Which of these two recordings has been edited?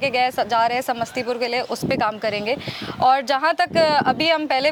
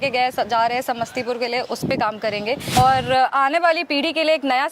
second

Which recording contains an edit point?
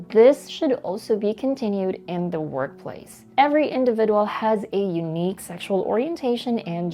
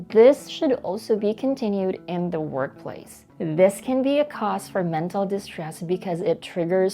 second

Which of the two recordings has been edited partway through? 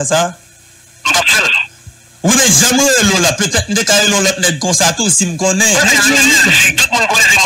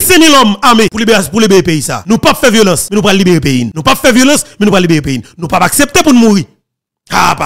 second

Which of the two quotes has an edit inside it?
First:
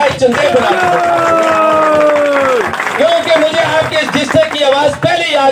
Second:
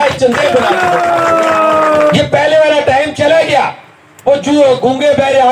second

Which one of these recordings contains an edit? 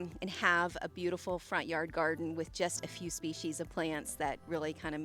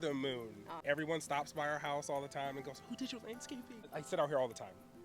second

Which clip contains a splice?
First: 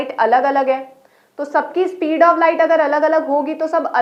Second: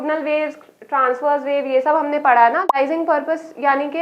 second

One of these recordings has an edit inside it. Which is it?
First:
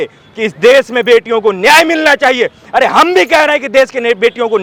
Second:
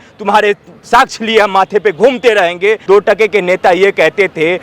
second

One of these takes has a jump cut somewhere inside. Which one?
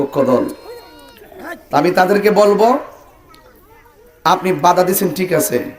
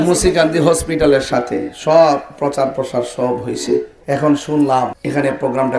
second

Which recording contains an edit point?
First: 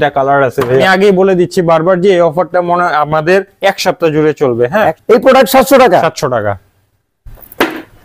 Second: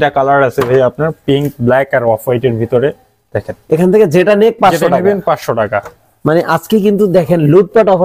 first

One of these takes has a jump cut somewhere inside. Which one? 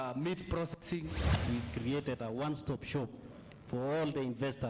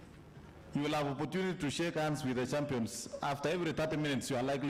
first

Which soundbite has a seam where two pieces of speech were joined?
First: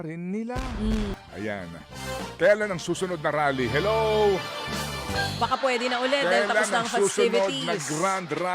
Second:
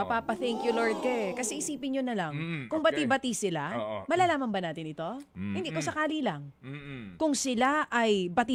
first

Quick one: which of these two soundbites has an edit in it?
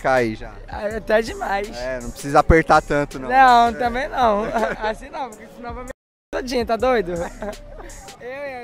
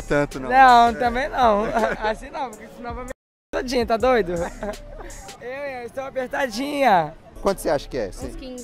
second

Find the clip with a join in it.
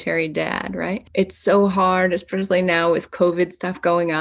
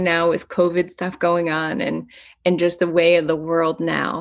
first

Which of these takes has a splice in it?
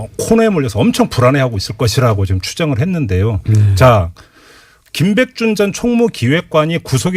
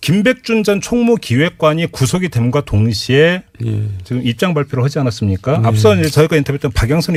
first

